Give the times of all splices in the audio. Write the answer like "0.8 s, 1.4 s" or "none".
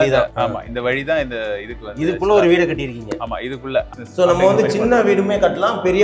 3.9 s